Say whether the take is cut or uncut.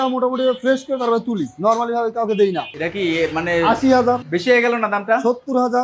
cut